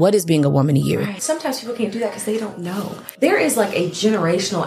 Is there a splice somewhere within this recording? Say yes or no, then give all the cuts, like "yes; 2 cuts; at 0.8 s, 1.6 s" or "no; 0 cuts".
yes; 2 cuts; at 1.2 s, 3.0 s